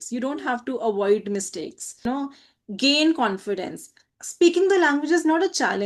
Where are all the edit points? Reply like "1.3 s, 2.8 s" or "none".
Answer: 2.0 s